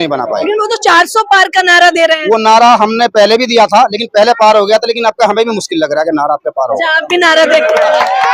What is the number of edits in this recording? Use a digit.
0